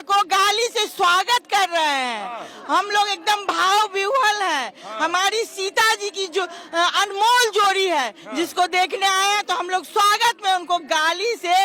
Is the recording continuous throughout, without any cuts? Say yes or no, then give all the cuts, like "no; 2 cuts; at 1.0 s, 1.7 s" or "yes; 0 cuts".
yes; 0 cuts